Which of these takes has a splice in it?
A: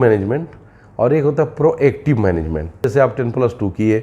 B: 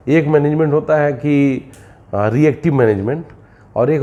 A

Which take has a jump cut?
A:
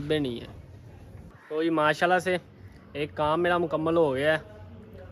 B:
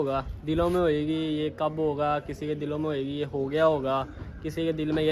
A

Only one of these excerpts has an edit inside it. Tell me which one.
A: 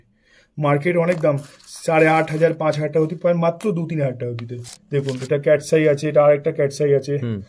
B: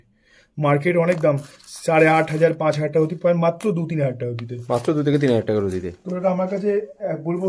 A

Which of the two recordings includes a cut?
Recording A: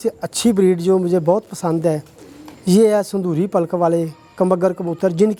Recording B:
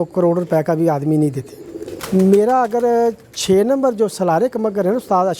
B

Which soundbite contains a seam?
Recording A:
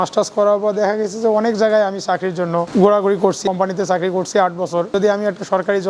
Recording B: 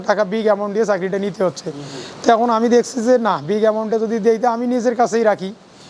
A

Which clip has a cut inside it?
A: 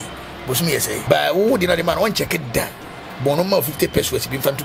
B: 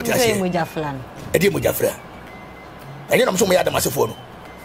A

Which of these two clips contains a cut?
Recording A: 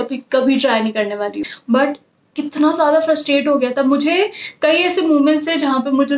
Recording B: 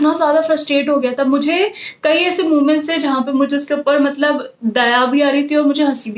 A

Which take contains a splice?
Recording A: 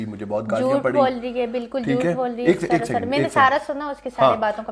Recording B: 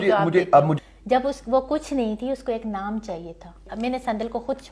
B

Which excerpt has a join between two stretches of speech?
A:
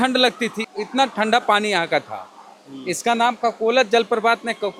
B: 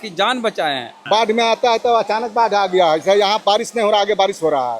B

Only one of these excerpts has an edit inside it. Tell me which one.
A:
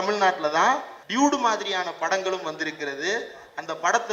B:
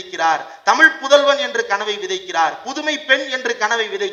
A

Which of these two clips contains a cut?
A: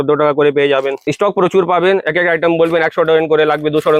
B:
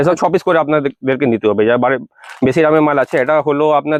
A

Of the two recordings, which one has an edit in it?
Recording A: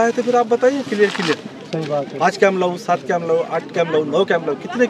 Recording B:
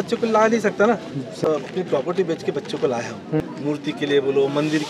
B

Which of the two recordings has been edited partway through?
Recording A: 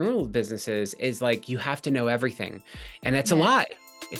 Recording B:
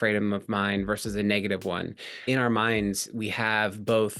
B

